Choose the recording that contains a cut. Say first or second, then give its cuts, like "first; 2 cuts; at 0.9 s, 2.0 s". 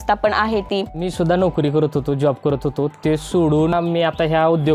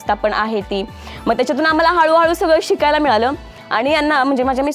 first; 2 cuts; at 1.0 s, 3.7 s